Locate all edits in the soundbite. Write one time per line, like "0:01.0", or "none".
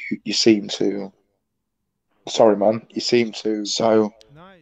0:03.7